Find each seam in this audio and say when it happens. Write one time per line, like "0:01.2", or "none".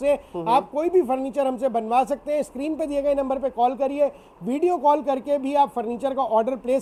none